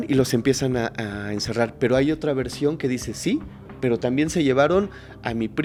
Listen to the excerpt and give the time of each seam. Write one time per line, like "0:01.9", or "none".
none

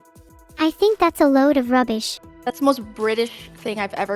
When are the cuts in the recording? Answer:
0:02.1

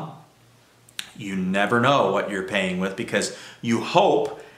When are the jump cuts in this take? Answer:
none

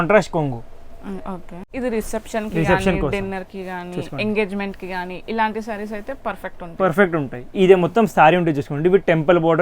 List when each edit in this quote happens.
0:01.7

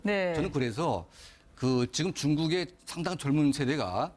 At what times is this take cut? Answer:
none

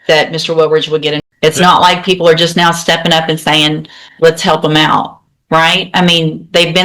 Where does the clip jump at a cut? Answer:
0:01.2

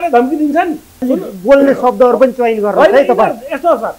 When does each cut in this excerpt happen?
0:01.0

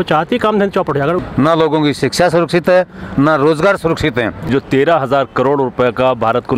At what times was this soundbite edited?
0:01.2
0:04.4

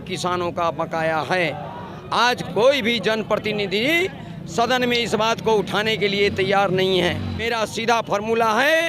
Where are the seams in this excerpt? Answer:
0:07.4

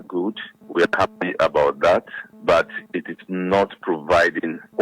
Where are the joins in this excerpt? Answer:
none

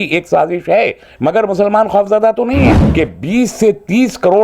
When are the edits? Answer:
0:02.8

